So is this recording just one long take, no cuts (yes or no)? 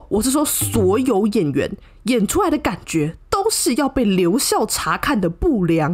yes